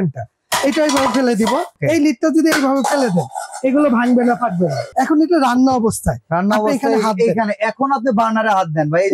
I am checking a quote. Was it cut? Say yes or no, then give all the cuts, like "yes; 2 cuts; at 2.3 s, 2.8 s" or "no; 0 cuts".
yes; 2 cuts; at 1.7 s, 4.9 s